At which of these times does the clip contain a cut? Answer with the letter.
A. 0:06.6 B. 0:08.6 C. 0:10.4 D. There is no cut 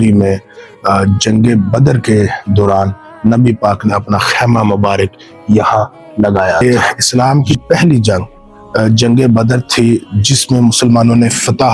A